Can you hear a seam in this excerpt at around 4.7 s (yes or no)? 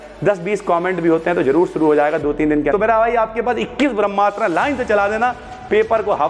no